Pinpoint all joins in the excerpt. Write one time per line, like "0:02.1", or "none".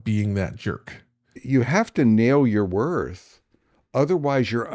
0:01.4